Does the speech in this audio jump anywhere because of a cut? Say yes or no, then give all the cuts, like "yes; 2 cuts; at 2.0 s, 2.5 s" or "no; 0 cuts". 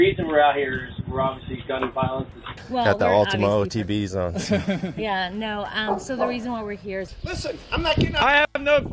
yes; 2 cuts; at 2.6 s, 7.0 s